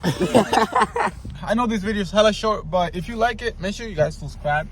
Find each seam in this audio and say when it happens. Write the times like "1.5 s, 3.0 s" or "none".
1.4 s